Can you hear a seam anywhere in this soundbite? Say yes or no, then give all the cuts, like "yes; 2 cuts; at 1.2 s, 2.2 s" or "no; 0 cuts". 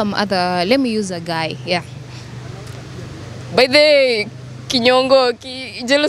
no; 0 cuts